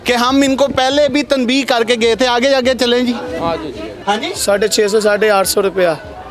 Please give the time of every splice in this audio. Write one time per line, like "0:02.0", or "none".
0:03.9

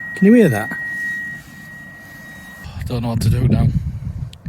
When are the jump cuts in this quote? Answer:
0:02.7

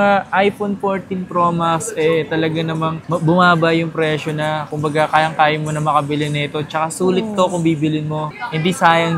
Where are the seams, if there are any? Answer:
none

